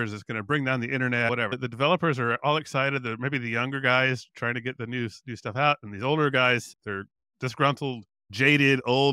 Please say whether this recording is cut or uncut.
cut